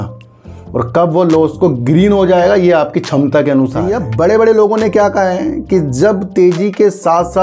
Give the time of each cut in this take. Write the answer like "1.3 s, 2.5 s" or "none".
3.9 s